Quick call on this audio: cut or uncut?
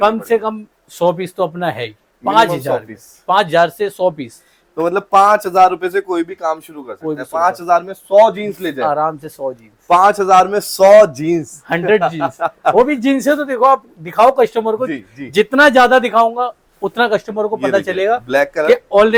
uncut